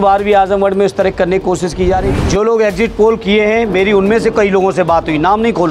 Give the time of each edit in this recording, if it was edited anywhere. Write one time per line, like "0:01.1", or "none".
0:02.1